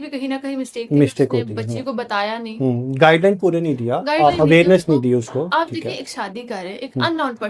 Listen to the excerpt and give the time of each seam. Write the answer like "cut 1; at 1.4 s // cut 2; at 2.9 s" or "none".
none